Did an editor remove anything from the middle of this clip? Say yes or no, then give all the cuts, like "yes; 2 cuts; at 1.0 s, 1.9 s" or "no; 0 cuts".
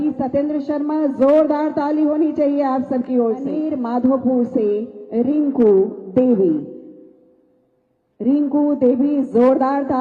yes; 1 cut; at 3.5 s